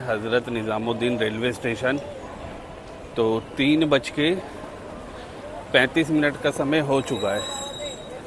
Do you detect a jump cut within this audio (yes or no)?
no